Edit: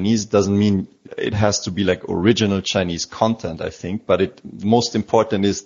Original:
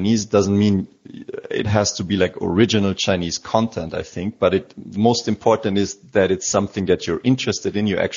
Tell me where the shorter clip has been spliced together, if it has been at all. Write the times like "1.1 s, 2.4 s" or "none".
1.0 s